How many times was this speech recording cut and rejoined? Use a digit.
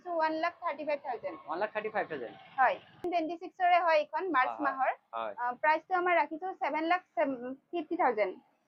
1